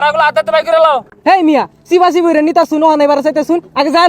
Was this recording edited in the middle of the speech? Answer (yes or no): yes